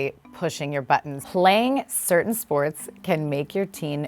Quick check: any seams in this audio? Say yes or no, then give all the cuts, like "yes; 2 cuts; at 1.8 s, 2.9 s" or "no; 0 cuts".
yes; 1 cut; at 1.2 s